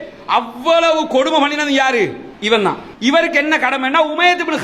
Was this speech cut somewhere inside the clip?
yes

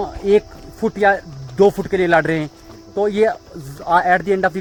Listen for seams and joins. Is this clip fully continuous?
yes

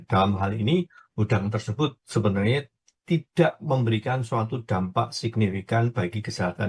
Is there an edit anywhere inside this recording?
no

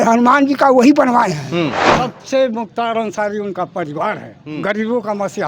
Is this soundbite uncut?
no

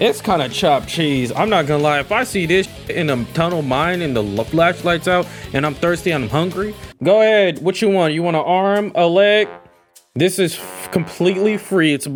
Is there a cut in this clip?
no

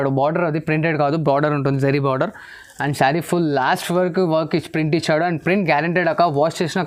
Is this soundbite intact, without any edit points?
yes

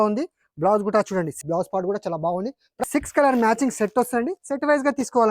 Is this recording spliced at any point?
yes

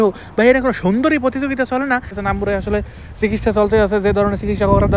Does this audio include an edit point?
yes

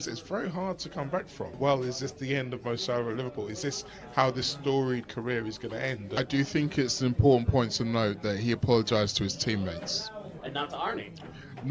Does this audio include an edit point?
yes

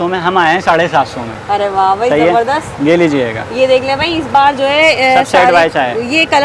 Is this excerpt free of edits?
yes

